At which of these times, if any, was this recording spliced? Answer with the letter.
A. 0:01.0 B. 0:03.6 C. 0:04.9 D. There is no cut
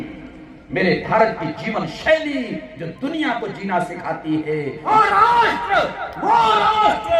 C